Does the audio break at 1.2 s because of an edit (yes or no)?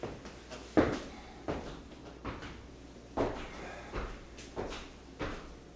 no